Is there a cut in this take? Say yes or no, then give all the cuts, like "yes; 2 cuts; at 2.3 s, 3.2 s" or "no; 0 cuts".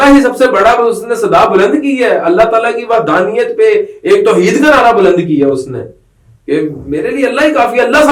no; 0 cuts